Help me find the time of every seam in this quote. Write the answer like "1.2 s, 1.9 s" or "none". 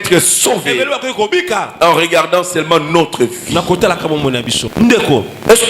4.6 s